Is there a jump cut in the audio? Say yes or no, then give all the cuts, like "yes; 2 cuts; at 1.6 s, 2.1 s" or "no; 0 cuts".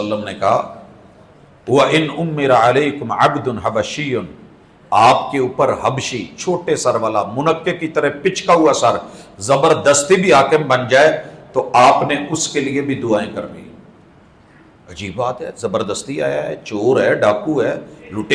no; 0 cuts